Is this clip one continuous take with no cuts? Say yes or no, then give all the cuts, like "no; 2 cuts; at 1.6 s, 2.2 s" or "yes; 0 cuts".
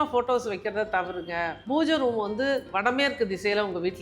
no; 1 cut; at 1.6 s